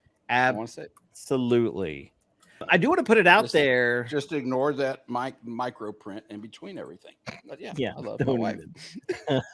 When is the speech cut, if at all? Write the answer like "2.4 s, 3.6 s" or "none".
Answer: 2.6 s